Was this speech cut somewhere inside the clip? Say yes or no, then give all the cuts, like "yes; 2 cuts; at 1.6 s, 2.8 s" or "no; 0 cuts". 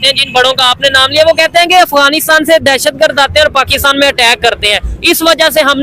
no; 0 cuts